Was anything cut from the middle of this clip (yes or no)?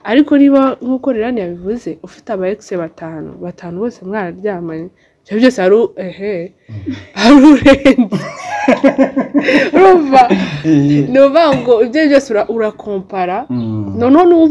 no